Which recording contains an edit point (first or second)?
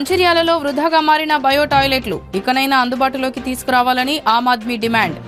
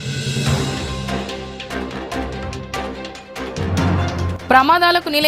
second